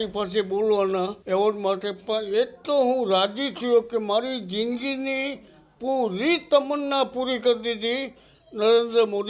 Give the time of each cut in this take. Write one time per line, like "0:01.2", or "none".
0:01.2